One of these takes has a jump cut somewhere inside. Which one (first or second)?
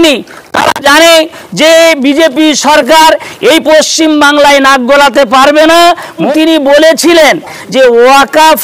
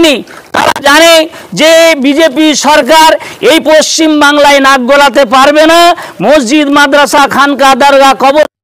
first